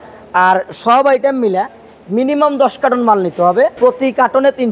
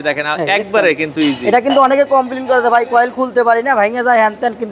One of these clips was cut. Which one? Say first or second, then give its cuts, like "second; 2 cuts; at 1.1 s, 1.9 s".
first; 1 cut; at 3.7 s